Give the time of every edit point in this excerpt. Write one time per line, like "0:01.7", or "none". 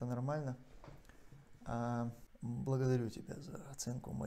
0:02.3